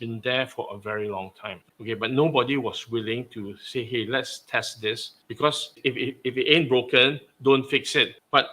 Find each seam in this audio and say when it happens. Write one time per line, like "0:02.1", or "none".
0:01.6
0:05.8